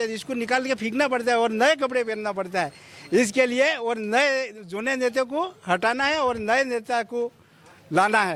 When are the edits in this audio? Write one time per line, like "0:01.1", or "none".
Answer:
none